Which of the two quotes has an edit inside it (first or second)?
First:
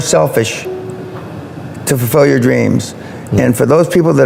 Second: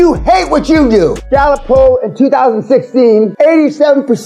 second